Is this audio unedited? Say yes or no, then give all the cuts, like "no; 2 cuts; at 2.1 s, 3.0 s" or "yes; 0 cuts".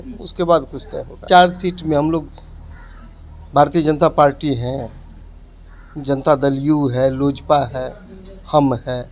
no; 1 cut; at 1.2 s